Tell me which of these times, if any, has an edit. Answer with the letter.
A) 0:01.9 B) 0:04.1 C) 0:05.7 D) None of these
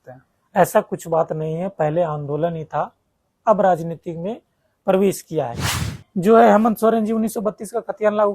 C